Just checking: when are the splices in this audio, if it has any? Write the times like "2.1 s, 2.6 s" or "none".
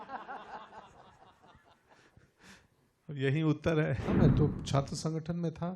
4.1 s

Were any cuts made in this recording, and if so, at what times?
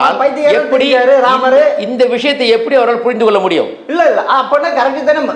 none

